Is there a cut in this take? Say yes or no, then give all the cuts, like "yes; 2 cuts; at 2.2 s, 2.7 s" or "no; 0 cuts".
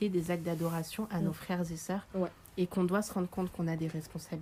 no; 0 cuts